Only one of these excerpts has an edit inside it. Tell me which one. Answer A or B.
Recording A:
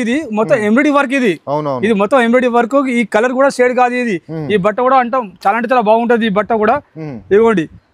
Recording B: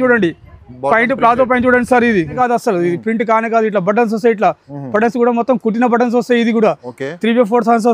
B